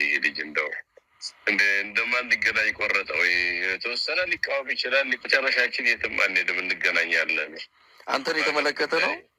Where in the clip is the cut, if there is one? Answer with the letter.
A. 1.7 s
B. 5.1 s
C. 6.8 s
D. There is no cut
B